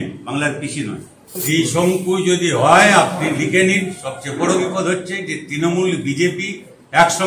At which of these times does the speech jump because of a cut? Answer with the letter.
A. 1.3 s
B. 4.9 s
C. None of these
A